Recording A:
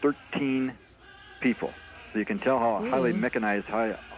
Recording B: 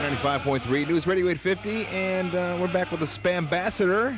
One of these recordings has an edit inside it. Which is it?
A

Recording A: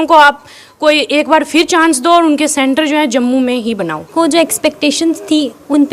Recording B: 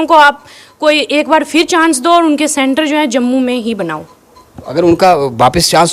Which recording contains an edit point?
A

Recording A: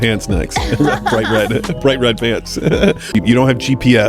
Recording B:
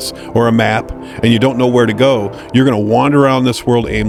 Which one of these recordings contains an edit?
A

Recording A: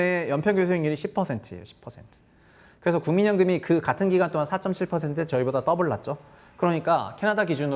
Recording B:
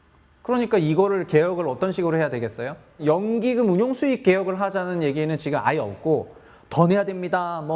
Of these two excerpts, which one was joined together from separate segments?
B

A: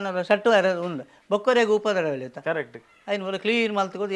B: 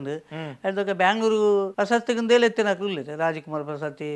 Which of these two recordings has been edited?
B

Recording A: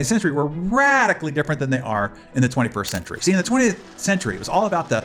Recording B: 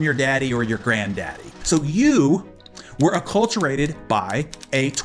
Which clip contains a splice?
B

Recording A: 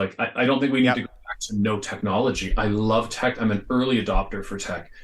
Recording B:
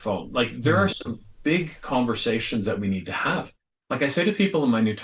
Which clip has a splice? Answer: B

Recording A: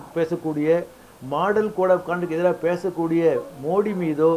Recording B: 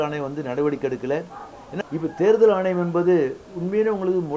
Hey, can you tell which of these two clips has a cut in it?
B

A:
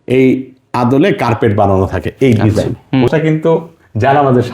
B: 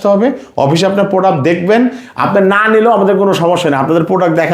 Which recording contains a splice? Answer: A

